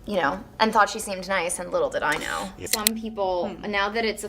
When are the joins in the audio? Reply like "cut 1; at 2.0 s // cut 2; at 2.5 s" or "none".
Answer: cut 1; at 2.6 s